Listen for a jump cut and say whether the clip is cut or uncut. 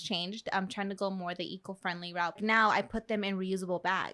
cut